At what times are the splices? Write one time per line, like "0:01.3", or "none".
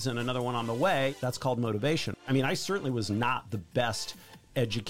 0:01.1
0:02.2